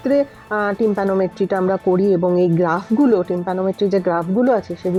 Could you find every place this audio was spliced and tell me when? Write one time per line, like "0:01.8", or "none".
none